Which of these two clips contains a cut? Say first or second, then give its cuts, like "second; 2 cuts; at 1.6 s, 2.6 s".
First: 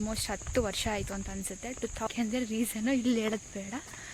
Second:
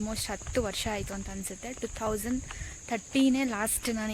first; 1 cut; at 2.1 s